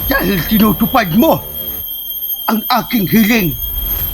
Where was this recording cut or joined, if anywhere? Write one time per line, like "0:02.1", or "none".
none